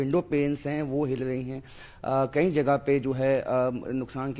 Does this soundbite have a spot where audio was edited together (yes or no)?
no